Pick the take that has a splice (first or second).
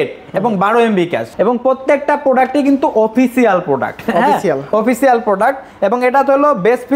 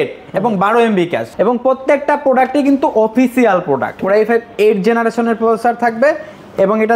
second